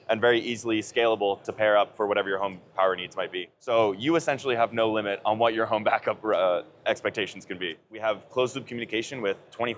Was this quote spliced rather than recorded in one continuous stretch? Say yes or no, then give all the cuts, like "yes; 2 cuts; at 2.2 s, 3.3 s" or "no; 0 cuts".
yes; 2 cuts; at 3.5 s, 7.9 s